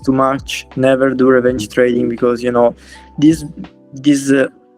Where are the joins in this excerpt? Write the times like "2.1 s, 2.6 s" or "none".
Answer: none